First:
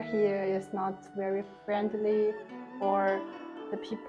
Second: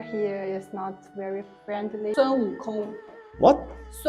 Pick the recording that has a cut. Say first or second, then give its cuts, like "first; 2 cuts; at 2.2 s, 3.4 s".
second; 1 cut; at 2.1 s